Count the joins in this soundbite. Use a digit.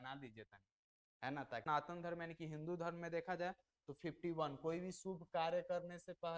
1